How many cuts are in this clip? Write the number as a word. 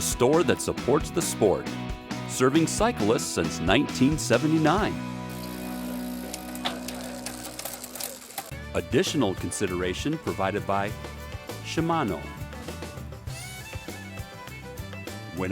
one